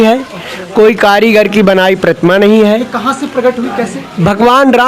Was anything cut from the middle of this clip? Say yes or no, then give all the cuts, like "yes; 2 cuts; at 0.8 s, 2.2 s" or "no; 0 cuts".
no; 0 cuts